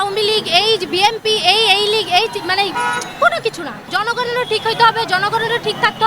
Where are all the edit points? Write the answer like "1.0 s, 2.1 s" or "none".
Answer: 3.9 s